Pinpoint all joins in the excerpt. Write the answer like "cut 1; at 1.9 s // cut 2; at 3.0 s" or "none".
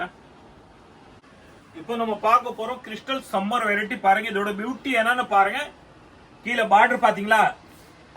cut 1; at 1.2 s